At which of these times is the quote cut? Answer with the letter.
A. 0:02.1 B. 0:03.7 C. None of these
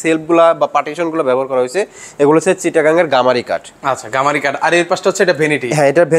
C